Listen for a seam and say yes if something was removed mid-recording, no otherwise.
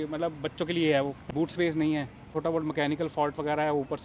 yes